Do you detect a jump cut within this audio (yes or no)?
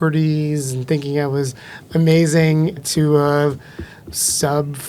no